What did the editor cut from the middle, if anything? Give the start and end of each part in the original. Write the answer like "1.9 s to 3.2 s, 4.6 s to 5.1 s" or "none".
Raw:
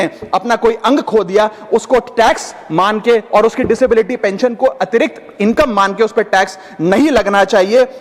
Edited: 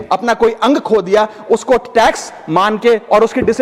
none